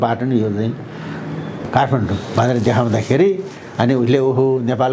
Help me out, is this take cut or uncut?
cut